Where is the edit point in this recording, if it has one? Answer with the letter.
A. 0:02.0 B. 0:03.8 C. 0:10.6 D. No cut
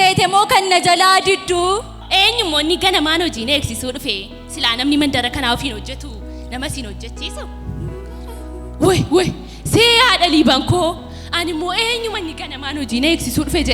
A